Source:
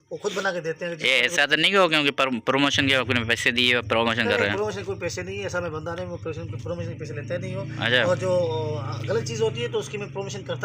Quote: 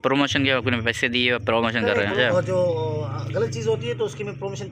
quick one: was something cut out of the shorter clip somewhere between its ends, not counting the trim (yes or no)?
yes